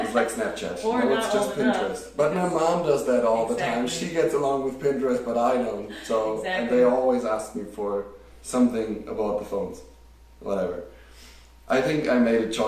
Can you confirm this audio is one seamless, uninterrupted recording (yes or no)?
yes